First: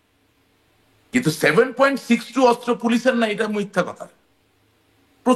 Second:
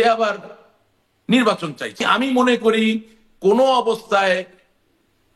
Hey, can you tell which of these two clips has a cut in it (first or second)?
second